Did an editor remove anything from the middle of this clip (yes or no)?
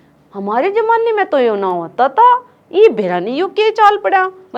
no